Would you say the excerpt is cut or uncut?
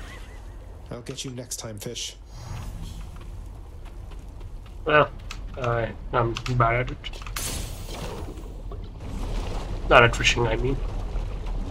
uncut